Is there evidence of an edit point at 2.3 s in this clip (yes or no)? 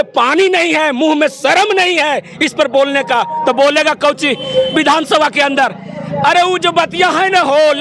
no